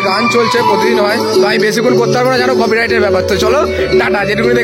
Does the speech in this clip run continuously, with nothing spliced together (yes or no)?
yes